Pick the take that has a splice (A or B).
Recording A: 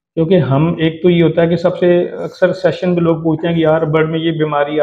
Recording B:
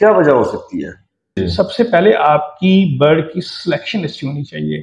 B